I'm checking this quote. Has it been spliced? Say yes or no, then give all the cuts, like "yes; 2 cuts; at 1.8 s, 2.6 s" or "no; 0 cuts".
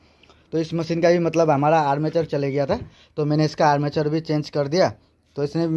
no; 0 cuts